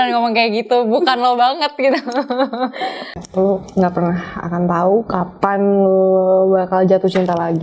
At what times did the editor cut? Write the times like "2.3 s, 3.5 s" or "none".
3.0 s